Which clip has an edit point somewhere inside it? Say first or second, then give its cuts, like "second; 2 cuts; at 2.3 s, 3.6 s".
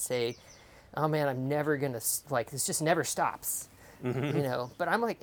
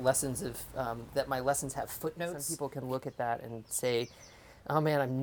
second; 1 cut; at 2.5 s